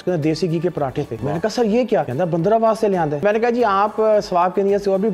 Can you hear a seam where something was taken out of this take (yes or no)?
yes